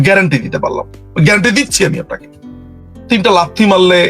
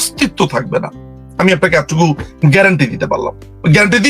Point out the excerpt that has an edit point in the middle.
first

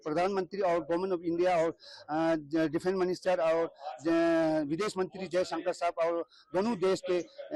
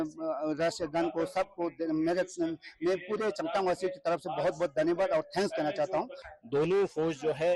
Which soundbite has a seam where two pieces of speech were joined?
second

